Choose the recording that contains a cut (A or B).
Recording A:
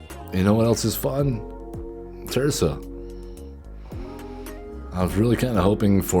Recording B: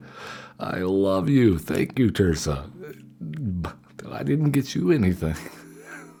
A